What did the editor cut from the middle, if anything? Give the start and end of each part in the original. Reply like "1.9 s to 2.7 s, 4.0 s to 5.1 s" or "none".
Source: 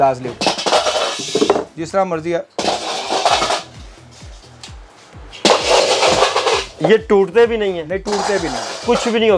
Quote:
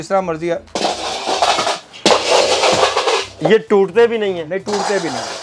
3.7 s to 5.3 s